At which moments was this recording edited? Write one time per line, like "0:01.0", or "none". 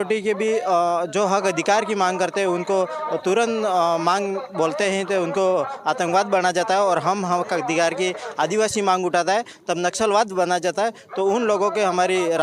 none

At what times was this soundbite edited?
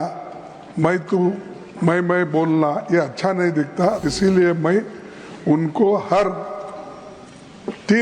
0:04.1

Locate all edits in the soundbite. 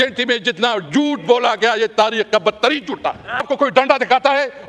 0:03.4

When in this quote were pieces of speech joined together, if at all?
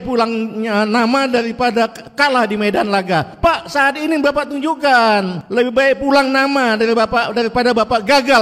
0:02.0
0:03.3
0:05.4

